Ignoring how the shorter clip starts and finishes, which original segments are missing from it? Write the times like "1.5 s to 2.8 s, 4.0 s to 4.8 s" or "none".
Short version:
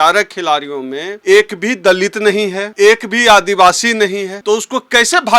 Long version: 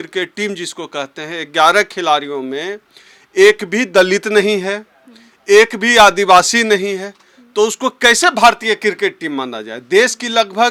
2.7 s to 3.2 s, 4.7 s to 5.3 s, 7.0 s to 7.4 s